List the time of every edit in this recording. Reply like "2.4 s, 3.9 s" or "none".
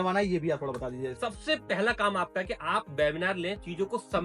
1.1 s